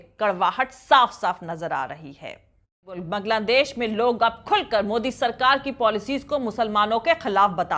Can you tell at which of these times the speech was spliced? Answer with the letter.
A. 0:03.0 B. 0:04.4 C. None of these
A